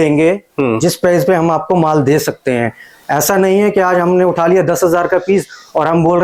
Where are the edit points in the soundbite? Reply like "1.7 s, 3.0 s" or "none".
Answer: none